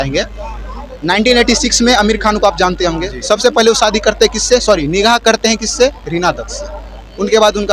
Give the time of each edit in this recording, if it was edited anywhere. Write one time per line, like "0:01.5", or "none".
none